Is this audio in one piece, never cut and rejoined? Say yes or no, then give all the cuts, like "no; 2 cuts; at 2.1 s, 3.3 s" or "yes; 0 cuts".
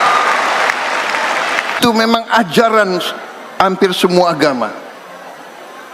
no; 1 cut; at 1.8 s